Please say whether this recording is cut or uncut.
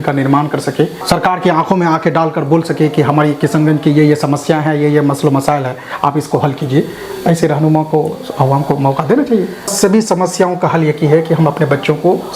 cut